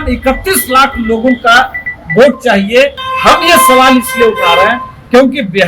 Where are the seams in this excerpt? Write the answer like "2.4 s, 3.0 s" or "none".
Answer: 3.1 s